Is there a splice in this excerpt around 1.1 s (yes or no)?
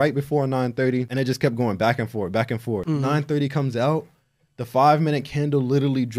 yes